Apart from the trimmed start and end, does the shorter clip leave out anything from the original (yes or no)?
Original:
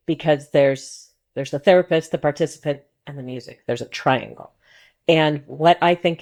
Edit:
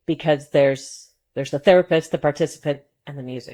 no